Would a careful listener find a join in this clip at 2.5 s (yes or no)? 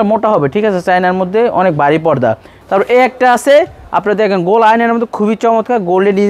yes